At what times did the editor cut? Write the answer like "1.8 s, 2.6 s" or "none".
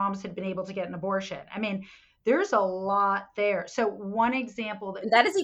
none